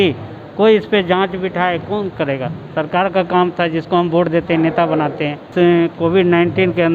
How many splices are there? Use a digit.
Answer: 1